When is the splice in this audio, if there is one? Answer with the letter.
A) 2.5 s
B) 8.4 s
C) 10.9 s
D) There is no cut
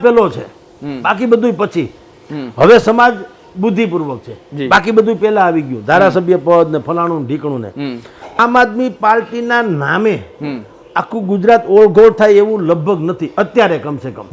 B